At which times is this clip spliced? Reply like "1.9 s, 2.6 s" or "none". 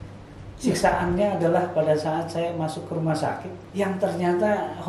3.6 s